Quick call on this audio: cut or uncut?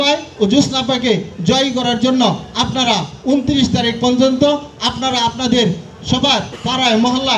uncut